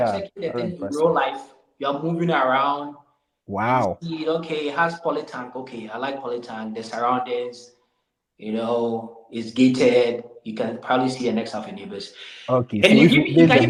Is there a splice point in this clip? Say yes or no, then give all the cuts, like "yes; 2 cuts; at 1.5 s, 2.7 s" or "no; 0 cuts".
no; 0 cuts